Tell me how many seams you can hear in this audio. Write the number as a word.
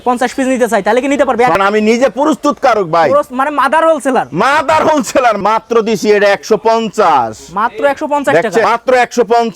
three